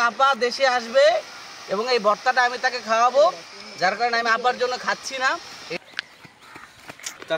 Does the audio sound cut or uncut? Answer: cut